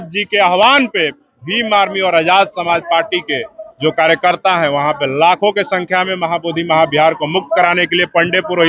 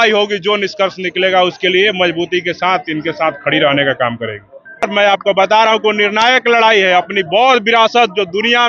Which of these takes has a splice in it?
second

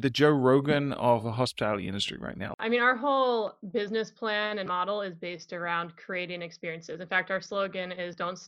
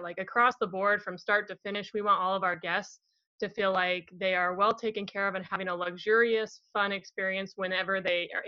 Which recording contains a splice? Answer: first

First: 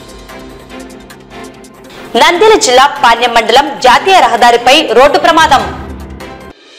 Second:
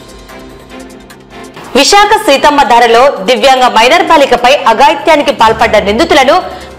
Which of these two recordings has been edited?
second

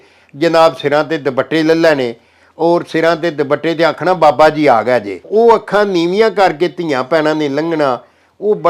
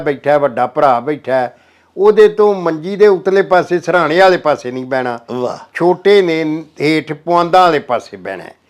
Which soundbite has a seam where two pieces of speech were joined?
first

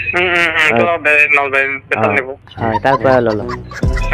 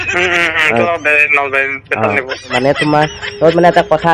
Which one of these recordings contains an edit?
second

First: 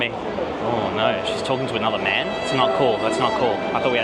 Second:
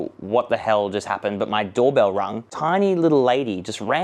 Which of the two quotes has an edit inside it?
second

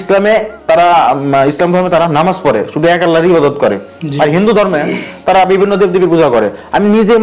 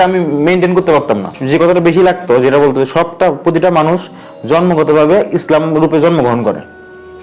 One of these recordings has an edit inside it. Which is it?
second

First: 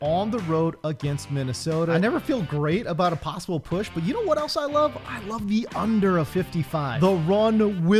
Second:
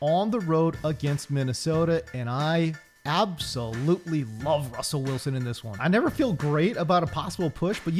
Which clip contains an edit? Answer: first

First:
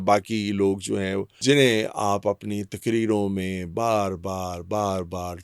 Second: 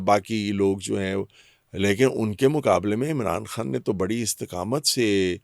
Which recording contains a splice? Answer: first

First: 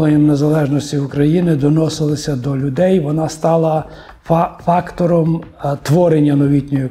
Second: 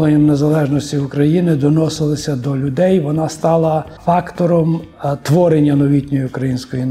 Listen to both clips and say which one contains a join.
second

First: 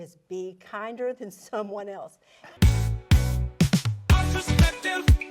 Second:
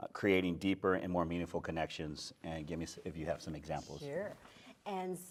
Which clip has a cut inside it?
first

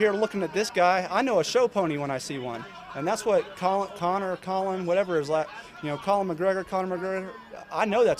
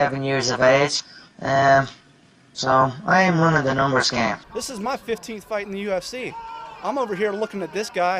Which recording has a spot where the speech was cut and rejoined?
second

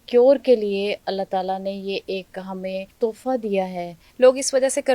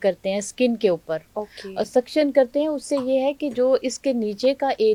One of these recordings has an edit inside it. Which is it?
first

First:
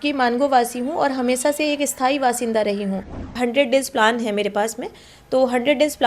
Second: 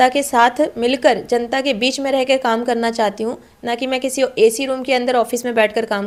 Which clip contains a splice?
first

